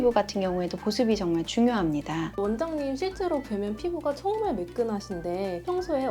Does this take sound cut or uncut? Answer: cut